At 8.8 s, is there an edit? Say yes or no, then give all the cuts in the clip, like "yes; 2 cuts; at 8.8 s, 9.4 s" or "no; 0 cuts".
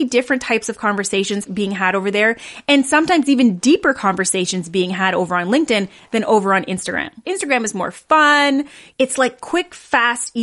yes; 2 cuts; at 1.5 s, 8.8 s